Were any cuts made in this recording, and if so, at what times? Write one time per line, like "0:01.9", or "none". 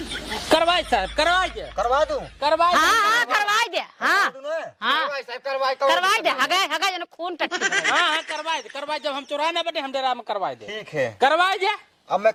none